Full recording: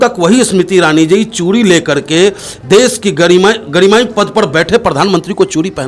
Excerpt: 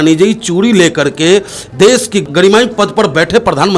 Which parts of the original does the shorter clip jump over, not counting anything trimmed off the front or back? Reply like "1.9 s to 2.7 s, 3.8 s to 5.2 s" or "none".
3.1 s to 3.6 s